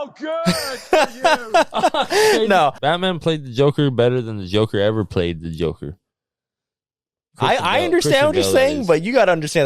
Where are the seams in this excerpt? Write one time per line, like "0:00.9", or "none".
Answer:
0:02.8